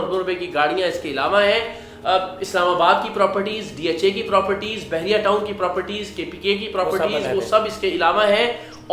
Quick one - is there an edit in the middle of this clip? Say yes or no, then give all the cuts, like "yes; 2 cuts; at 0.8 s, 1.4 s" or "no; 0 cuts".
no; 0 cuts